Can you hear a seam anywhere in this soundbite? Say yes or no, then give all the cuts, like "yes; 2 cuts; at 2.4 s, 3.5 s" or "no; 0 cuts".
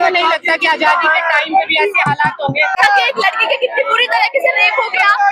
yes; 1 cut; at 2.7 s